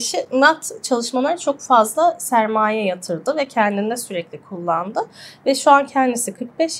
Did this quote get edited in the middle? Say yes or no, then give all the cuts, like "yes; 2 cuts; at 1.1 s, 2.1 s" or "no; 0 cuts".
no; 0 cuts